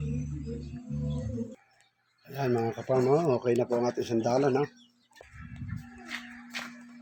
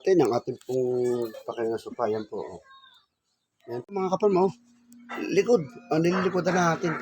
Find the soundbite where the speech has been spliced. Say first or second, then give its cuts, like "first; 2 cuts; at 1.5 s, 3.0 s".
second; 1 cut; at 3.9 s